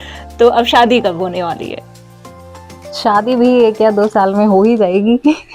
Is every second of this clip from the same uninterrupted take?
yes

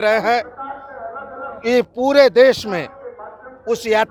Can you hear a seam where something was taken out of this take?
no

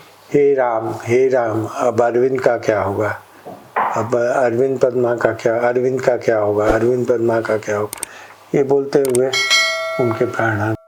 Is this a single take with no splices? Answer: yes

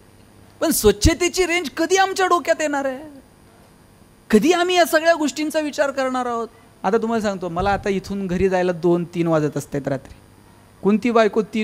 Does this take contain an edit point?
yes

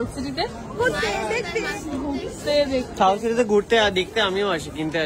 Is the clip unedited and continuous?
yes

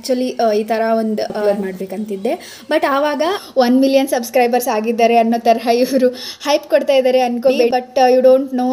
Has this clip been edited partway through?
yes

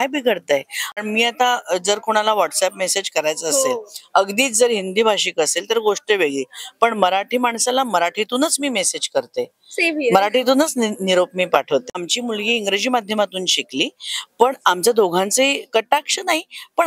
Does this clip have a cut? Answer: yes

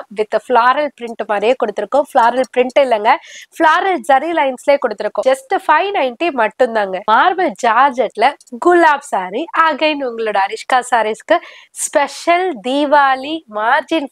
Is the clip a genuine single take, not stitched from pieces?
no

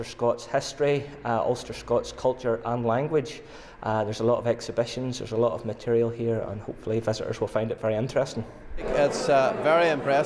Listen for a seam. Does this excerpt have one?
no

